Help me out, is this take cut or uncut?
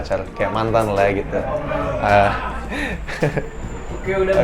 uncut